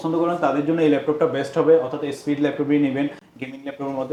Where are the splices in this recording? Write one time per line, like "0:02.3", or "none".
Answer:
none